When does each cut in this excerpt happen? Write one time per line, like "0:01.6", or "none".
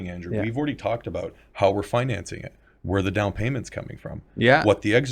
none